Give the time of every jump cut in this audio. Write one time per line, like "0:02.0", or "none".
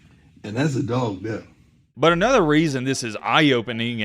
0:01.8